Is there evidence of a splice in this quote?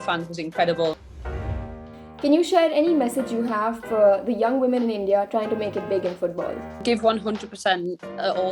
yes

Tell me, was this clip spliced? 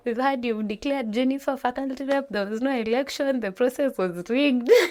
no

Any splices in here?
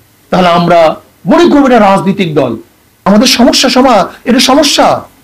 yes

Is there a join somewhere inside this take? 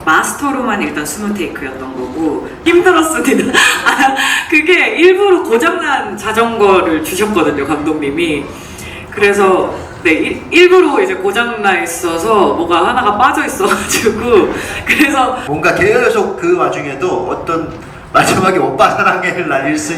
yes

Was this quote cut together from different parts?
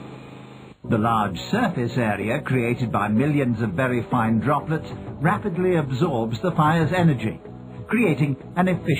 yes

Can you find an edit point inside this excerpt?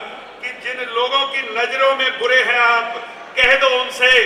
no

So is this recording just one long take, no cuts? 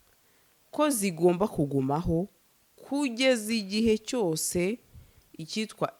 yes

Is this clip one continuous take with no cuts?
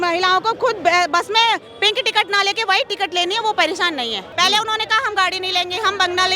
no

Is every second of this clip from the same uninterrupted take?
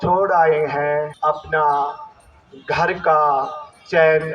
no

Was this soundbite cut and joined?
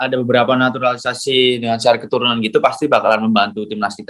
no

